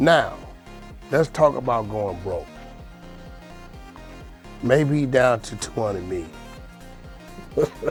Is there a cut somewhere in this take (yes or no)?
no